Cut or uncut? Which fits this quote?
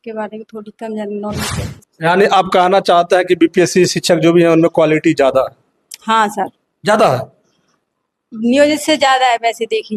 cut